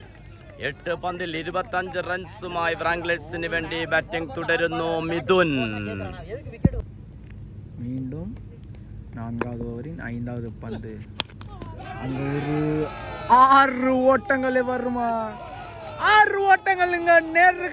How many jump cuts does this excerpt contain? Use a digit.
1